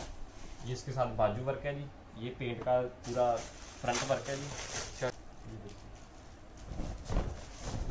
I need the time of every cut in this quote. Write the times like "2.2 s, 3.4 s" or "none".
5.1 s